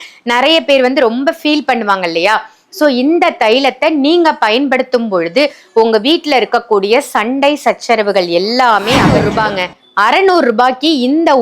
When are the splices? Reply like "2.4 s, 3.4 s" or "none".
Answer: 9.2 s